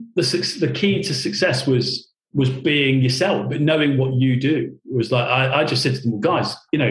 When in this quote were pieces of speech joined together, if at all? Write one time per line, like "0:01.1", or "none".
none